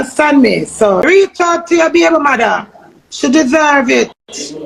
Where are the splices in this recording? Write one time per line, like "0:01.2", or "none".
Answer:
0:01.0